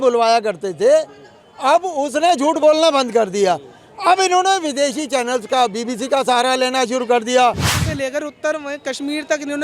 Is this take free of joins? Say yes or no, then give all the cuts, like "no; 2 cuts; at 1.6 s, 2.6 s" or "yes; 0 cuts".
no; 1 cut; at 7.6 s